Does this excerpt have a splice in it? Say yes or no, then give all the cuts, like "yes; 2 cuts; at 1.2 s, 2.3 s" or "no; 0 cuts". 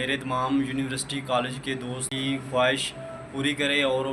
yes; 1 cut; at 2.1 s